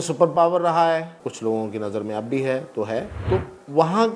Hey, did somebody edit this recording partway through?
yes; 2 cuts; at 1.2 s, 3.1 s

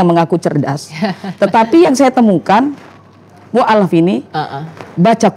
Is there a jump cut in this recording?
no; 0 cuts

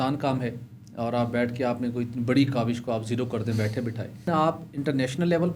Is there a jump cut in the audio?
yes; 1 cut; at 4.3 s

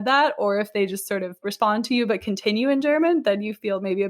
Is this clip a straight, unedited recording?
no; 1 cut; at 1.5 s

